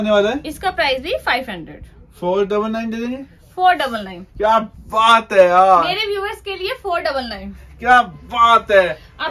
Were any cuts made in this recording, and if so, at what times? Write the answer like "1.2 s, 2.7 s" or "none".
none